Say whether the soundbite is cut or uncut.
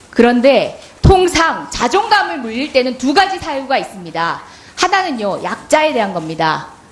cut